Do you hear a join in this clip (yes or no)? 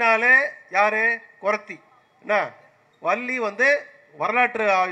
no